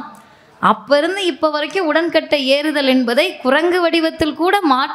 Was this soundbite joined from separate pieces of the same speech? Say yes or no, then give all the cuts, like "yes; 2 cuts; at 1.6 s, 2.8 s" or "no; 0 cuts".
no; 0 cuts